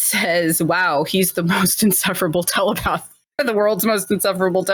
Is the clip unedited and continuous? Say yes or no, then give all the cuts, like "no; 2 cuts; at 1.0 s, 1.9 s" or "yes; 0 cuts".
yes; 0 cuts